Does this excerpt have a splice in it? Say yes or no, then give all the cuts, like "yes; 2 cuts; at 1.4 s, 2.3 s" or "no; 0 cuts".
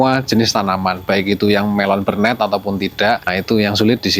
yes; 1 cut; at 3.2 s